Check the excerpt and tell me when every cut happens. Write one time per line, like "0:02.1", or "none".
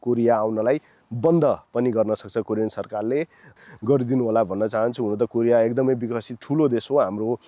0:03.5